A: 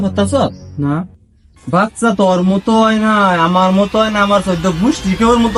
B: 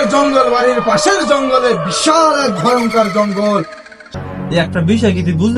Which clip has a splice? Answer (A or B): B